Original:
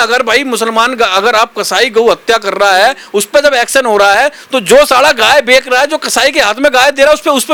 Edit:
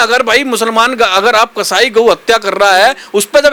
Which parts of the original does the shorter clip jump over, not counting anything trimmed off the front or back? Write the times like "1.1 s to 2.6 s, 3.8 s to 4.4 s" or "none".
none